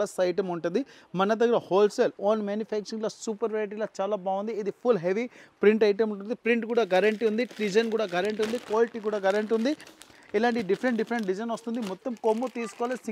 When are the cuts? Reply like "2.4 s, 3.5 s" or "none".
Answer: none